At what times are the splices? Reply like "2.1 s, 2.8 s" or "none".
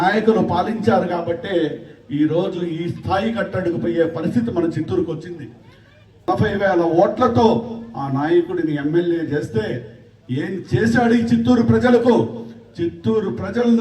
6.3 s